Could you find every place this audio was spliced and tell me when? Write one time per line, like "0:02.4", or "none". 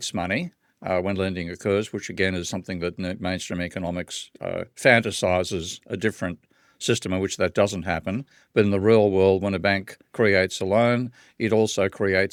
none